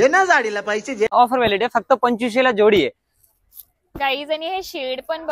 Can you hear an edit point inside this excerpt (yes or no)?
yes